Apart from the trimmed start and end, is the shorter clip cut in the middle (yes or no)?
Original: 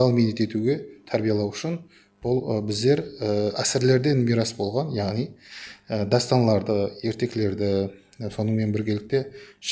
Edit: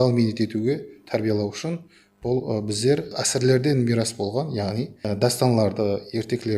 yes